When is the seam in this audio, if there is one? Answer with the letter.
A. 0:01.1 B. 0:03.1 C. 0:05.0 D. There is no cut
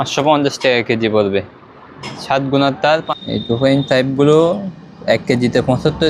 B